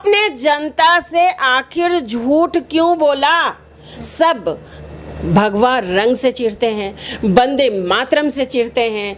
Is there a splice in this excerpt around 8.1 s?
no; 1 cut; at 3.9 s

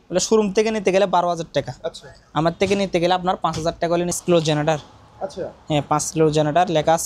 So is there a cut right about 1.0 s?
no; 1 cut; at 4.1 s

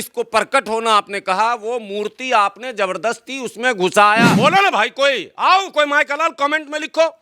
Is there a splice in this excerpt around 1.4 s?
no; 1 cut; at 4.3 s

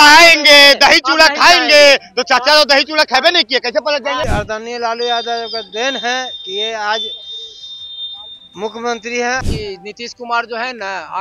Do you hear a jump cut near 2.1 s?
no; 2 cuts; at 4.3 s, 9.5 s

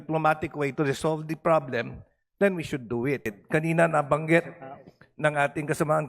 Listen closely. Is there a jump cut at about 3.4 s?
yes; 1 cut; at 3.4 s

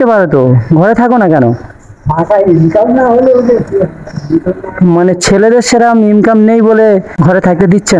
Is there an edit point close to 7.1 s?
yes; 1 cut; at 7.1 s

